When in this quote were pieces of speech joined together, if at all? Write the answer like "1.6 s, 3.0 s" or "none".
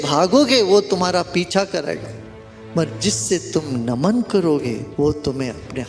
4.9 s

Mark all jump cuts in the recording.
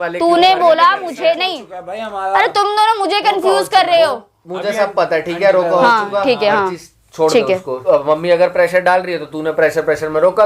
7.7 s

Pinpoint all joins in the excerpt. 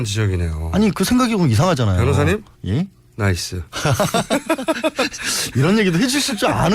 3.2 s

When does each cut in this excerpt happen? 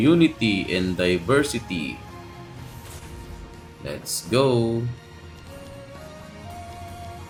none

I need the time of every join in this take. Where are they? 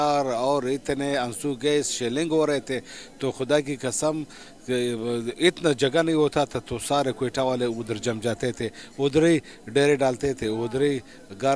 none

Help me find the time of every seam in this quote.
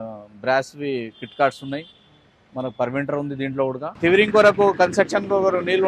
3.9 s

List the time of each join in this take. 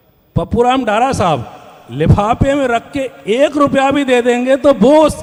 none

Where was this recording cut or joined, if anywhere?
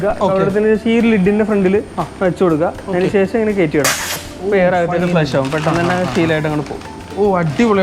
none

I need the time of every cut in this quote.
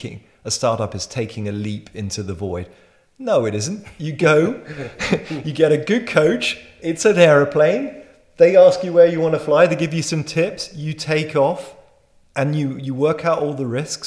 none

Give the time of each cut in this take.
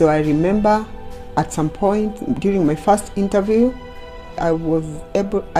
4.4 s

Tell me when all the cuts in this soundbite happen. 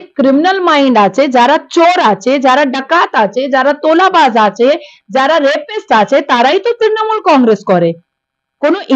none

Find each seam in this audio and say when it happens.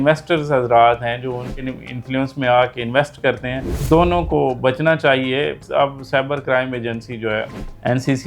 1.5 s, 5.6 s

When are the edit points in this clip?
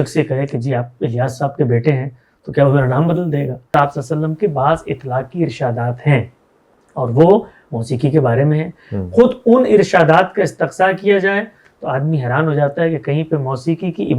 3.7 s

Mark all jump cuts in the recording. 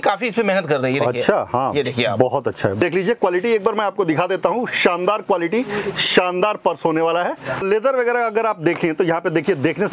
2.8 s, 7.6 s

